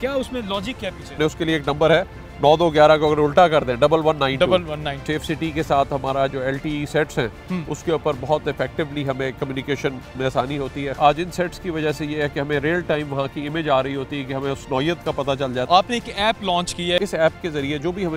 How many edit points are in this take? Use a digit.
5